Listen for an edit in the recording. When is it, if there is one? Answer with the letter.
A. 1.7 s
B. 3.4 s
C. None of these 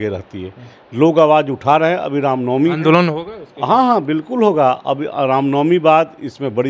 C